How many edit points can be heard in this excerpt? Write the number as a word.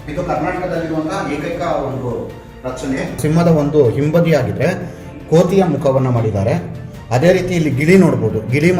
one